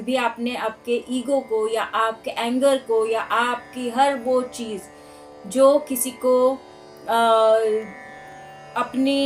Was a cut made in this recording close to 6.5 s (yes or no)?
no